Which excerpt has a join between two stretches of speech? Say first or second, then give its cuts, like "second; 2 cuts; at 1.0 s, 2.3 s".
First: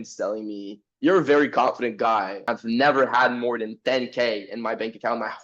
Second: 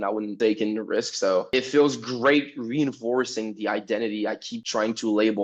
first; 1 cut; at 2.4 s